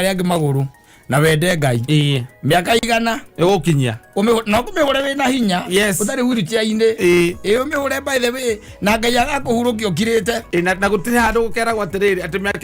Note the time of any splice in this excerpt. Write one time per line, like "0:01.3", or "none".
none